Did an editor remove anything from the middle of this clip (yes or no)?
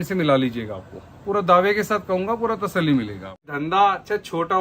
yes